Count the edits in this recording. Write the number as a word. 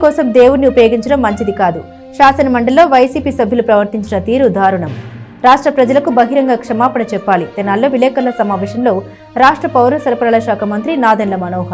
zero